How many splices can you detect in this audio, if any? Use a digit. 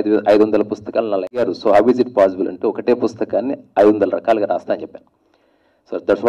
1